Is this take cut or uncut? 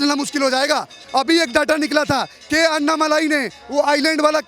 uncut